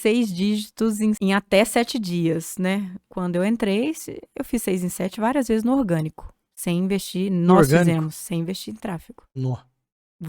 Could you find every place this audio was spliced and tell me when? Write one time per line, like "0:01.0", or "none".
0:01.2
0:03.0